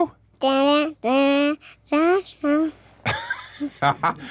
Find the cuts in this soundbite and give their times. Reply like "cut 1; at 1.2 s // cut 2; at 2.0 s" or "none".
none